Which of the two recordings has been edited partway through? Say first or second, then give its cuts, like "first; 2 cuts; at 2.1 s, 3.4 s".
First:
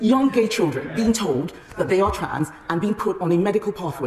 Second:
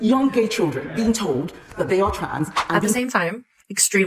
second; 1 cut; at 3.0 s